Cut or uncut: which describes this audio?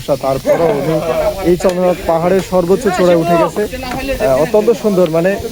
uncut